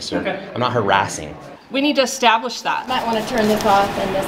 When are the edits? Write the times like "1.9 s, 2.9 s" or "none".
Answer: 1.5 s